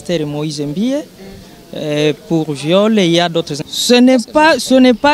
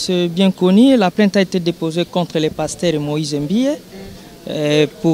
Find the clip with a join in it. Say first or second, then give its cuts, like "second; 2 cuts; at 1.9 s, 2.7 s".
first; 1 cut; at 3.6 s